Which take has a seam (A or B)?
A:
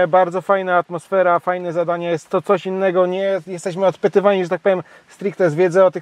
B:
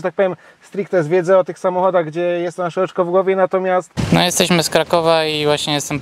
B